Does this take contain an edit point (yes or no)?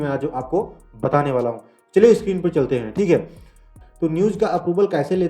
yes